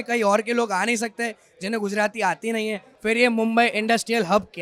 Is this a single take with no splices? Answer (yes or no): no